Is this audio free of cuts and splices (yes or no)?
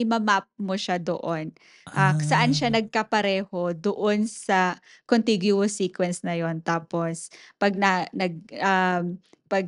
yes